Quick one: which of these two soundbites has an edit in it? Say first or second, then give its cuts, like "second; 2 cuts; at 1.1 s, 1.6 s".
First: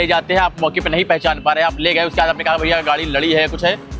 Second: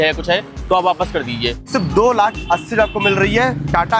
second; 1 cut; at 1.7 s